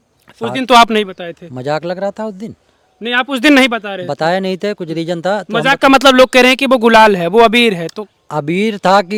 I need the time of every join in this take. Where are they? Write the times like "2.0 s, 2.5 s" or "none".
none